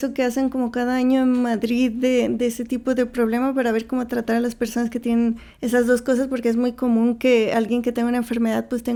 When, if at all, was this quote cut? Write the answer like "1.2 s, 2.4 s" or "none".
none